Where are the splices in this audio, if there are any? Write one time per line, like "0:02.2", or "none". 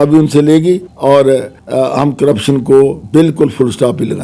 0:00.9
0:01.6
0:03.0